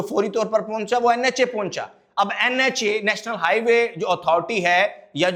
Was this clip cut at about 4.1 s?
no; 0 cuts

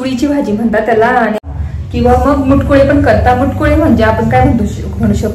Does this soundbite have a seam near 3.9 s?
no; 1 cut; at 1.5 s

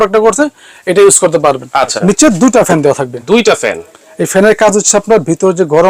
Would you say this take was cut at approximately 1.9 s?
yes; 1 cut; at 1.9 s

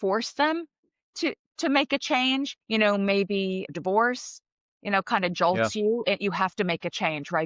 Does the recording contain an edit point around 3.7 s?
yes; 2 cuts; at 2.6 s, 3.7 s

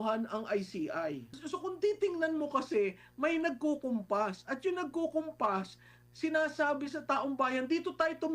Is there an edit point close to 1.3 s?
yes; 1 cut; at 1.3 s

